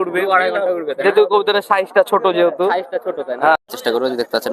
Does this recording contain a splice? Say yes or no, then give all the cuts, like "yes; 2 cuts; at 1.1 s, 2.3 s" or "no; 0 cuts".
yes; 1 cut; at 3.6 s